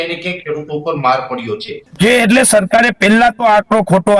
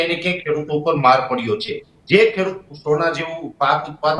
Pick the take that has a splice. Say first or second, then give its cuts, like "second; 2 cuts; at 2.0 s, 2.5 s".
first; 1 cut; at 1.9 s